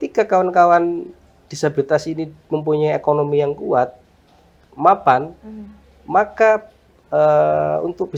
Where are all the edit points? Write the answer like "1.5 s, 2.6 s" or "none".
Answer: none